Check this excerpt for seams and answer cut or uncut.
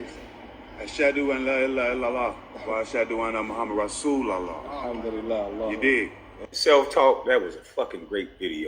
cut